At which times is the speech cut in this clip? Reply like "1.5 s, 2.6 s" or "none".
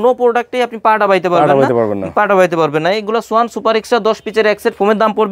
none